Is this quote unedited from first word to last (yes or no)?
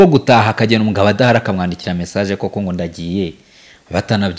yes